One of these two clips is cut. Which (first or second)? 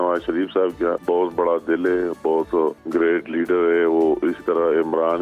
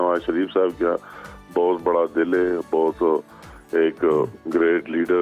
first